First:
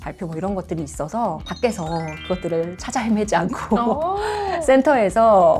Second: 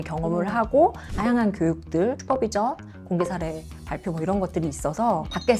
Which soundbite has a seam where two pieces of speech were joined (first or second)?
second